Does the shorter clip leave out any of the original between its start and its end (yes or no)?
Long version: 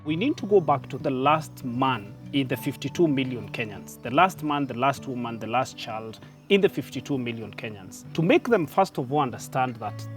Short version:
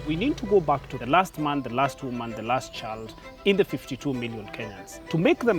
yes